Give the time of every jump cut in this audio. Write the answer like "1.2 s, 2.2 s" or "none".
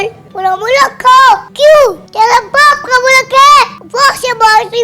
1.5 s, 2.0 s, 3.8 s